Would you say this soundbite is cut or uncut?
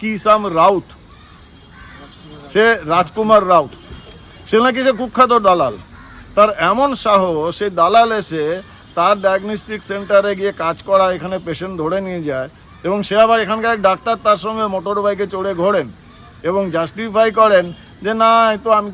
uncut